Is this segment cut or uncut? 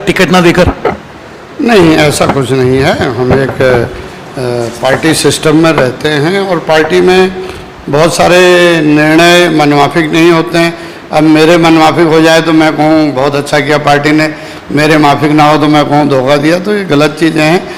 uncut